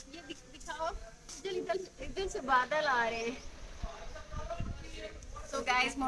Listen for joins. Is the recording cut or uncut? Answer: uncut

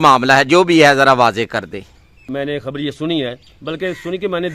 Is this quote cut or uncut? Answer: cut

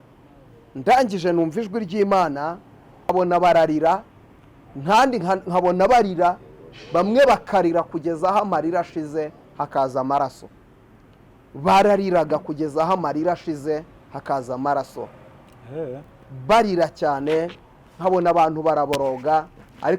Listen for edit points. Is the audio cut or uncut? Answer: cut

